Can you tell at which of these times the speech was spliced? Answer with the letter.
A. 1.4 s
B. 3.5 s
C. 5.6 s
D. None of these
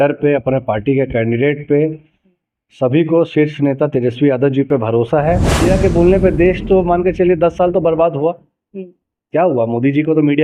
C